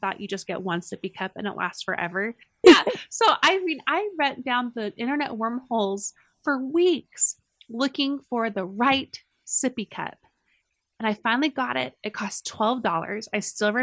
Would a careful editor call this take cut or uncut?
uncut